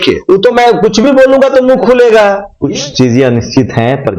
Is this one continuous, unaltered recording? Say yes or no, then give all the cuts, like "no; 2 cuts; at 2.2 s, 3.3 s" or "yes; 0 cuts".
no; 1 cut; at 2.5 s